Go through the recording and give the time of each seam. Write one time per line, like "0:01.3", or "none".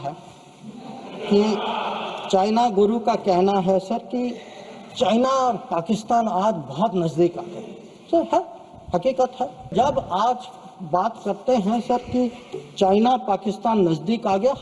0:09.7

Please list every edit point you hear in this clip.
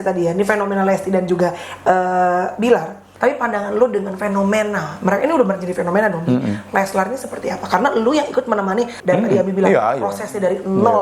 0:03.0
0:08.9

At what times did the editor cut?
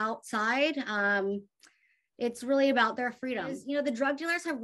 0:03.6

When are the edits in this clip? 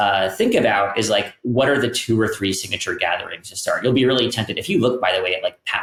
none

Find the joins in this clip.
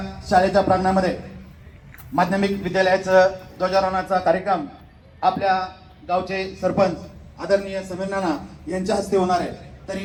none

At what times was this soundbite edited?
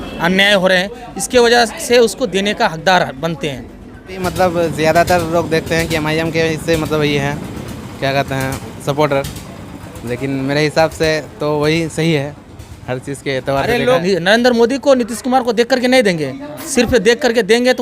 0:04.2
0:13.8

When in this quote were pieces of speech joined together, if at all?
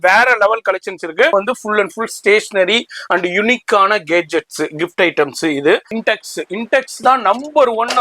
0:01.3
0:05.9

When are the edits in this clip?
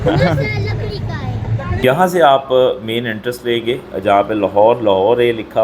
0:01.8

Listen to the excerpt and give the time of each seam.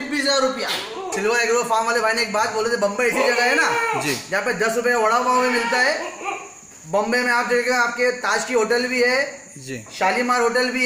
0:01.1

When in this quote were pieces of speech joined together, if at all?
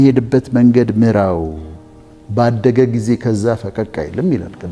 none

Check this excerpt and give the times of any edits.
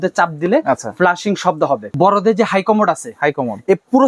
0:01.9

